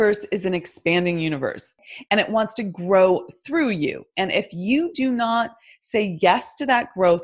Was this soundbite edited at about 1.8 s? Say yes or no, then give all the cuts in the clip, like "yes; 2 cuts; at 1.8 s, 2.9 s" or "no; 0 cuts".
yes; 1 cut; at 1.8 s